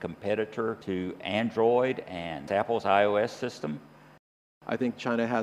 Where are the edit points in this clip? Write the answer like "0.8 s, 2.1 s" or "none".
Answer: 0.8 s, 4.4 s